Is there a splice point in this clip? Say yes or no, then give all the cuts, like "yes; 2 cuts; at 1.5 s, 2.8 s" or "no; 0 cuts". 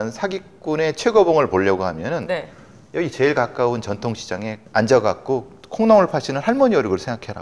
no; 0 cuts